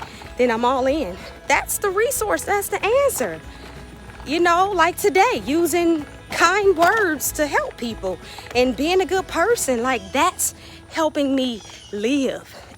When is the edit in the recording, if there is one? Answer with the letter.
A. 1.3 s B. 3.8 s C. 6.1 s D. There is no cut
A